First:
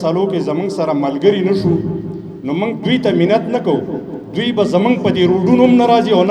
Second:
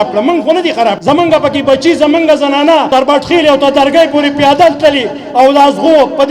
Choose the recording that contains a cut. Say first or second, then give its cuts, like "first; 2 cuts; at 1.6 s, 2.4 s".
second; 2 cuts; at 1.0 s, 2.9 s